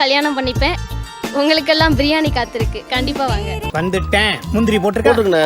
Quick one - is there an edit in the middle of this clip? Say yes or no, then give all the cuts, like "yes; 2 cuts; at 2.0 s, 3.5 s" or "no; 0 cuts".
no; 0 cuts